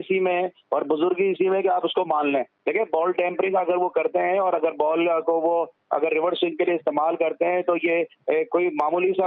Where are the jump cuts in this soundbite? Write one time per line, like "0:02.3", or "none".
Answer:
0:02.6